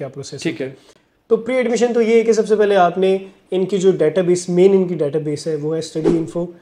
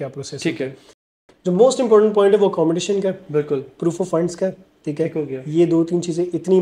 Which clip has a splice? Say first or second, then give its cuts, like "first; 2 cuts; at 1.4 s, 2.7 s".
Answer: second; 1 cut; at 1.2 s